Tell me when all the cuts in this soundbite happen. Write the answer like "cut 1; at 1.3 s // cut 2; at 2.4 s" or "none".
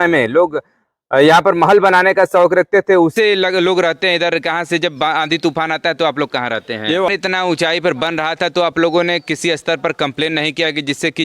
cut 1; at 3.1 s // cut 2; at 7.0 s